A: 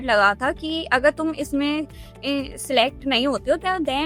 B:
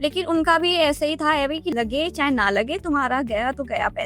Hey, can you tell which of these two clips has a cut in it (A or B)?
B